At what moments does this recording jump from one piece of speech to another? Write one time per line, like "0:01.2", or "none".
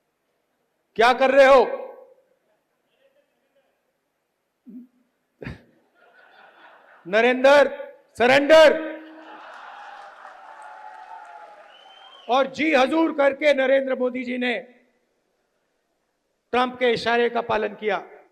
0:09.4